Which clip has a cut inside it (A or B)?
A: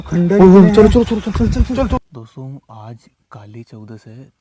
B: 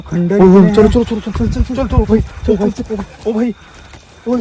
A